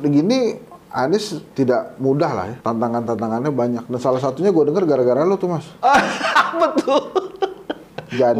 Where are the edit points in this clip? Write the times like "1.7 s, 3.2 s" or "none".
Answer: 1.4 s, 2.5 s